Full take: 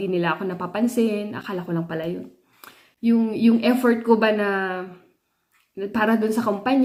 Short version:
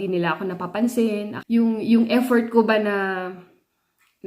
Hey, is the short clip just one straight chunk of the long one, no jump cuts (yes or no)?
no